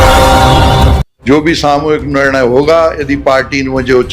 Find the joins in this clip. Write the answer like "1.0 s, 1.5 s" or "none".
1.0 s